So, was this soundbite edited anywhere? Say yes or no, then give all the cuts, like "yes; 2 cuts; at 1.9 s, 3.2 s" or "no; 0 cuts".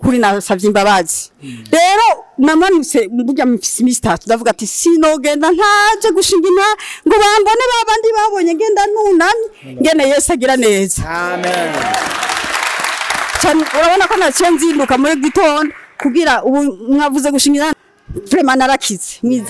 yes; 1 cut; at 17.7 s